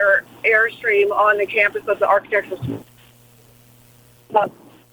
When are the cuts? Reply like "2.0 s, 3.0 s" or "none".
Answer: none